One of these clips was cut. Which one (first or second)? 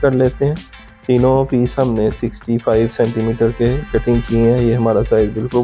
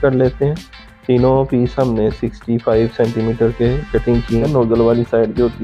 second